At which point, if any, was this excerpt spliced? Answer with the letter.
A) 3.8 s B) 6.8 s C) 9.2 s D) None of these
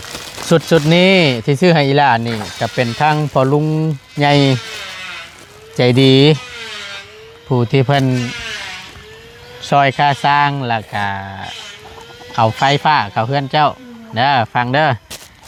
D